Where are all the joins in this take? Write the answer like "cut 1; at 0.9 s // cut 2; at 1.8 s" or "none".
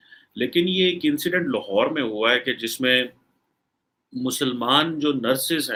none